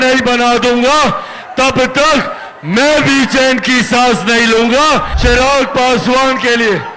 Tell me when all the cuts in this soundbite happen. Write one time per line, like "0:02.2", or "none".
0:05.1